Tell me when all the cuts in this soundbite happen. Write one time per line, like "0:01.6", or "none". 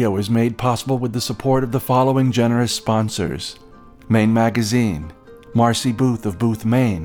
none